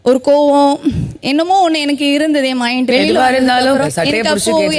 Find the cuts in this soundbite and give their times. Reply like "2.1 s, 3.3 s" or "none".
2.9 s, 3.8 s